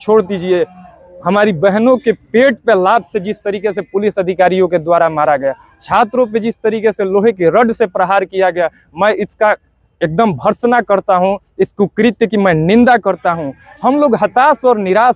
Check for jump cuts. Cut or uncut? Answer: uncut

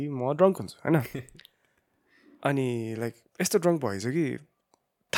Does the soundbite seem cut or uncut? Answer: uncut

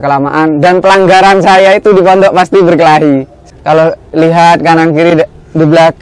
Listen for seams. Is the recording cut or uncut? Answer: cut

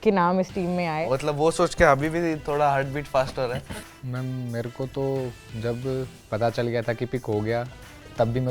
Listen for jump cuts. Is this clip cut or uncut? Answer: cut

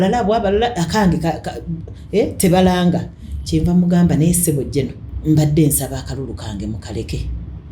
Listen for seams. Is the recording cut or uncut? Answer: cut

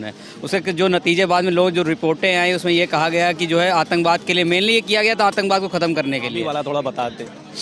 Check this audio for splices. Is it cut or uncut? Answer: cut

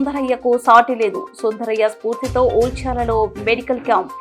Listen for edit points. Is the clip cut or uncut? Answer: uncut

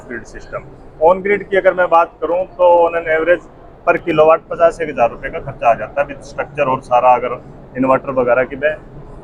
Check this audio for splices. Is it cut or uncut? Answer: uncut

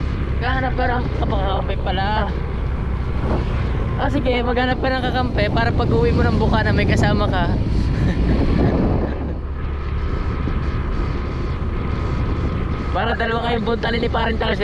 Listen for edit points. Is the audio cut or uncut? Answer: uncut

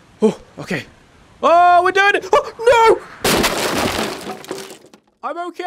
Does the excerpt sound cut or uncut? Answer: uncut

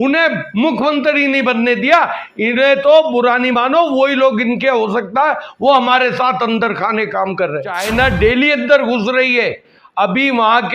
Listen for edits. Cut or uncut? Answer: cut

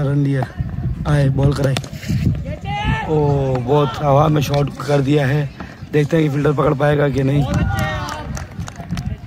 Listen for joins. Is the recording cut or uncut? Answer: uncut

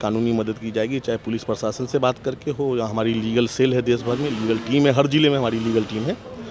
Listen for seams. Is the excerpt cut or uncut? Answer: uncut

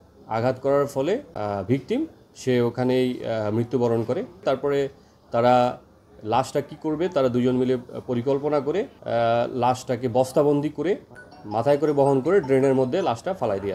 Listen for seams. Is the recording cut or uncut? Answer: cut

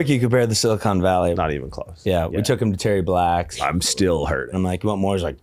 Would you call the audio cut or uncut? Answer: cut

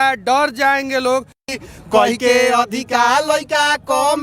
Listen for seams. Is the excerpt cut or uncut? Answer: cut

